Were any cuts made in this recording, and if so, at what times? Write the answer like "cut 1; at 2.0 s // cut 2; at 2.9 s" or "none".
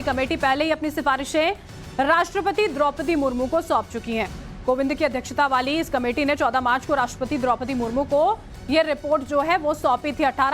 cut 1; at 7.7 s